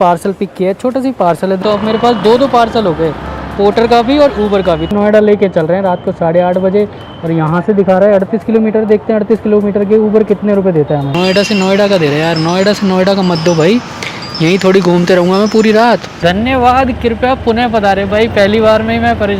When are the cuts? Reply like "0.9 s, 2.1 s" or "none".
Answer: 1.6 s, 3.4 s, 4.9 s, 11.1 s, 16.1 s